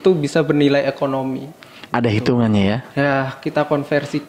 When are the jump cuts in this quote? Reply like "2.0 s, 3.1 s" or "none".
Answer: none